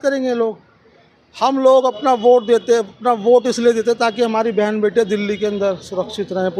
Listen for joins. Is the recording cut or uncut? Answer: uncut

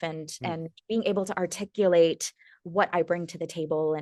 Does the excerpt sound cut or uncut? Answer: uncut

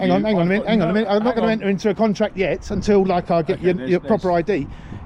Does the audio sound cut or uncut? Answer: uncut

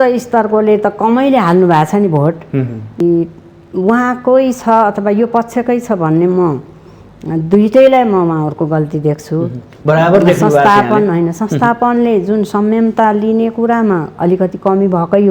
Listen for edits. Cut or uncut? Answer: cut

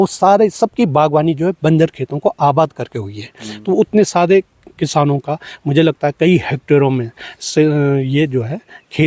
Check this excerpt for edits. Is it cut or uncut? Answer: uncut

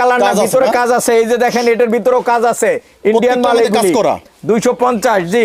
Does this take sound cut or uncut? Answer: uncut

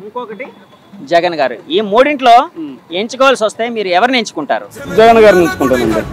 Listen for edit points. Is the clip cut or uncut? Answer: uncut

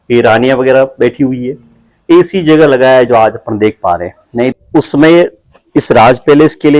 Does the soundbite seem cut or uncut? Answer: cut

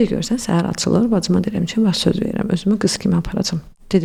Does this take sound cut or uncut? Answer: uncut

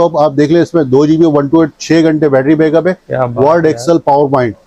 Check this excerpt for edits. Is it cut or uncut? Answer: uncut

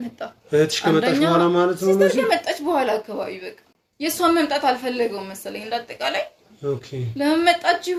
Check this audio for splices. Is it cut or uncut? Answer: uncut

